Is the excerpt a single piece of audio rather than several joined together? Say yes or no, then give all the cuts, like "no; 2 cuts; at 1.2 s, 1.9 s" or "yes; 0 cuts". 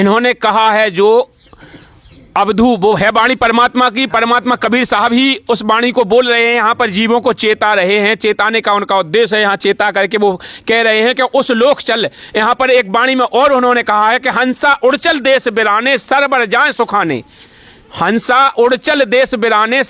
yes; 0 cuts